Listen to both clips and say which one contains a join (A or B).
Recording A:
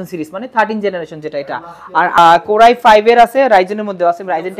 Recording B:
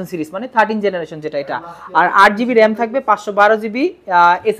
A